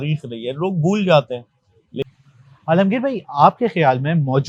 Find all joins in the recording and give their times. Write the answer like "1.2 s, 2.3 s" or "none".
2.0 s